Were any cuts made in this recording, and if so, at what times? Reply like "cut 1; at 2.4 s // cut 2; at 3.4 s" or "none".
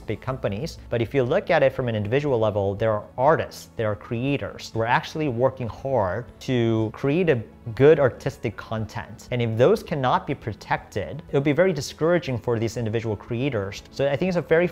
cut 1; at 4.7 s // cut 2; at 6.6 s // cut 3; at 11.2 s // cut 4; at 13.8 s